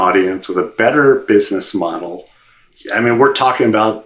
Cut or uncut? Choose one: cut